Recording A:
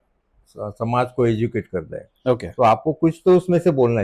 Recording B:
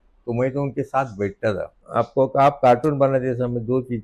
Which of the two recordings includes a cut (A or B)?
B